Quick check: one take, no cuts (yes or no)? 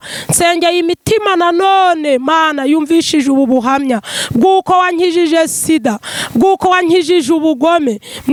yes